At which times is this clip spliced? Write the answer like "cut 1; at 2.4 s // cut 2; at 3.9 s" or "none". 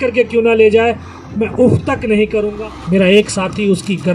cut 1; at 2.5 s